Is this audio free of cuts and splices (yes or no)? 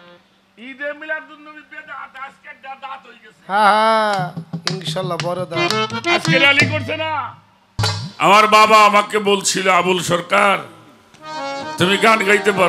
no